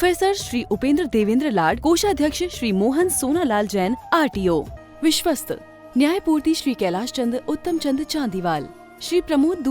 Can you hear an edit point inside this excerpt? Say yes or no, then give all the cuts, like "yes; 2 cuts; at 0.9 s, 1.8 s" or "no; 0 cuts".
yes; 1 cut; at 4.8 s